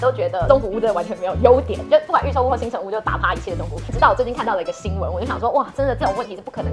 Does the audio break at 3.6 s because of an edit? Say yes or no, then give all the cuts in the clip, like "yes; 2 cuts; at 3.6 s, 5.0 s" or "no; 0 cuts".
no; 0 cuts